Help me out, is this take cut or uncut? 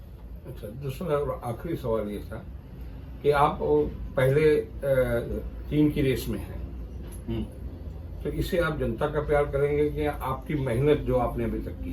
uncut